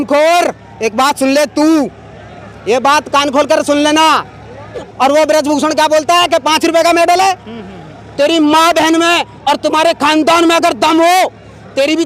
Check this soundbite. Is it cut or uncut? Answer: cut